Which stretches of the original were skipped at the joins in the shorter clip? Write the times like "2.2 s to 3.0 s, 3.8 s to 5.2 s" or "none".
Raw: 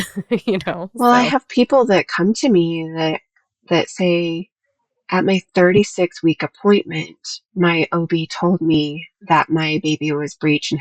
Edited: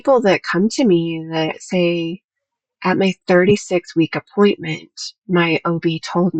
3.3 s to 3.9 s